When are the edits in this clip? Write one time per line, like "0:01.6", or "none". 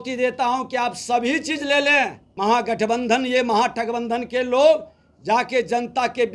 0:02.2